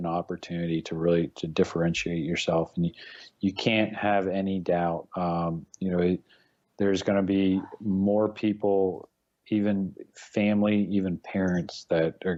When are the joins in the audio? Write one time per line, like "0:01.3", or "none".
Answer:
none